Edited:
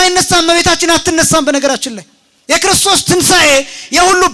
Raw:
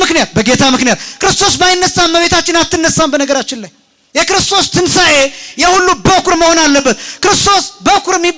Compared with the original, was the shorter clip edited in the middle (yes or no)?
no